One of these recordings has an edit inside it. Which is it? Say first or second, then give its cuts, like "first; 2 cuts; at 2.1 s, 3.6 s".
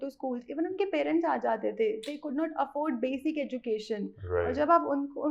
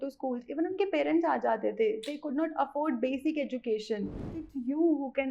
second; 1 cut; at 4.2 s